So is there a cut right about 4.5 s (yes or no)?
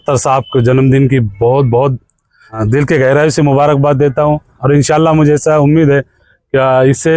yes